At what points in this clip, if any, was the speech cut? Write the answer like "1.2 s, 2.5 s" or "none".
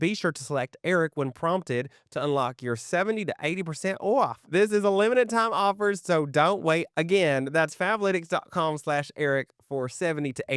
none